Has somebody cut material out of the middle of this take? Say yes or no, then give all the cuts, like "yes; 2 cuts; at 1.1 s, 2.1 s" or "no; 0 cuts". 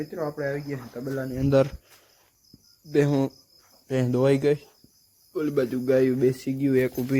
no; 0 cuts